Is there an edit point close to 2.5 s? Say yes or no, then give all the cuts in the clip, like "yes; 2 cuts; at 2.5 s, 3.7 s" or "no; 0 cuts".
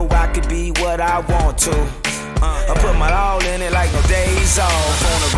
no; 0 cuts